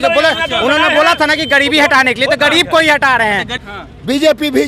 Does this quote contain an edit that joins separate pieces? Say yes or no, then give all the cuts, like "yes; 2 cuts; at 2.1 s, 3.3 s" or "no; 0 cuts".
yes; 1 cut; at 3.7 s